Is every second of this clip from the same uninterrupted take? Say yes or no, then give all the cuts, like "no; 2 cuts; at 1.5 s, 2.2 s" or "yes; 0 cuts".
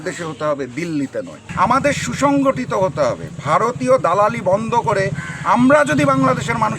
no; 1 cut; at 1.4 s